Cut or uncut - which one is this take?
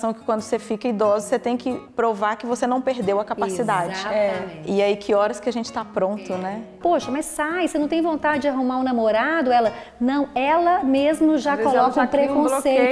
cut